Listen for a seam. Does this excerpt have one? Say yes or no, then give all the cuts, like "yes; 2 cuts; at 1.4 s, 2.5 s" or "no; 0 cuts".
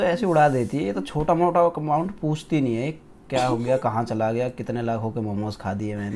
no; 0 cuts